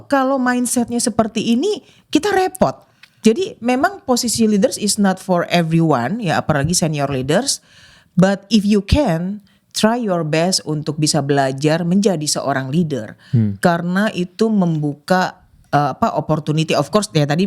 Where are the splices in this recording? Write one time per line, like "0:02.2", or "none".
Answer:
0:03.0